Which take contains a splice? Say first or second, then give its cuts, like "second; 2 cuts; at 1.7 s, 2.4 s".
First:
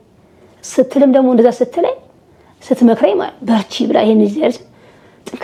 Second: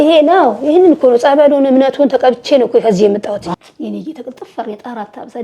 second; 1 cut; at 3.5 s